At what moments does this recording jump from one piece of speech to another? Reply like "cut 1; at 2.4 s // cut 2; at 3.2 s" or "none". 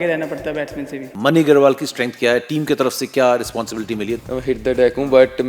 cut 1; at 1.1 s // cut 2; at 4.2 s

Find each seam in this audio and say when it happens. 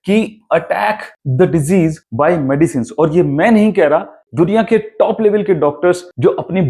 none

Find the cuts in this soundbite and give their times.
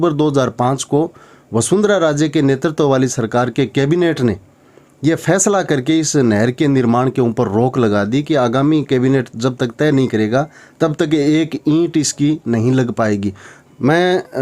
cut 1; at 13.5 s

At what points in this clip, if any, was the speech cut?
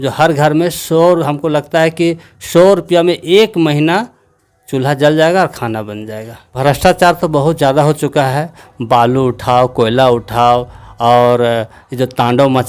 cut 1; at 6.5 s

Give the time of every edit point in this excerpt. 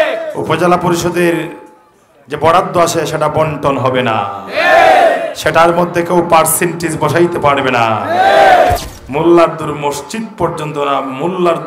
cut 1; at 8.9 s

